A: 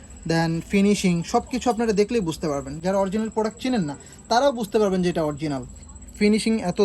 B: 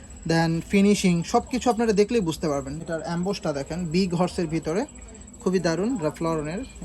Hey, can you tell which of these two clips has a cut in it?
B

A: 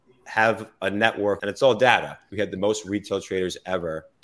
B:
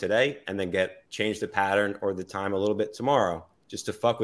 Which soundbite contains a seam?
A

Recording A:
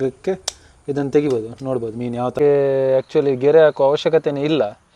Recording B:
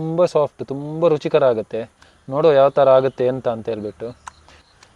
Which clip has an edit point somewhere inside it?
A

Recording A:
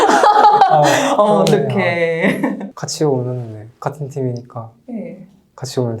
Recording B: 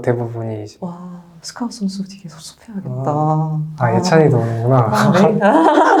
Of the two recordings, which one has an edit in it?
A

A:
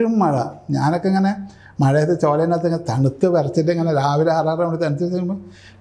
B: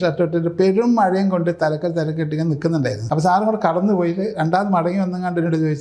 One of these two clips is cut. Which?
B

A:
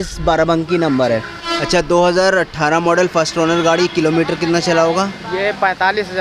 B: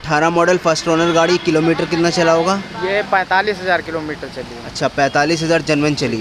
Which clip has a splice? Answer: A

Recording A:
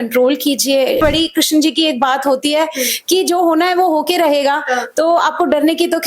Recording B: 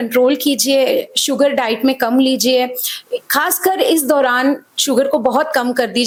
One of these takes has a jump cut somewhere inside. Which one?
A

